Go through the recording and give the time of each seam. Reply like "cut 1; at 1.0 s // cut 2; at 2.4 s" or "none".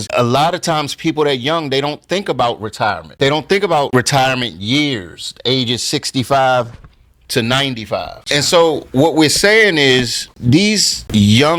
cut 1; at 3.1 s // cut 2; at 8.2 s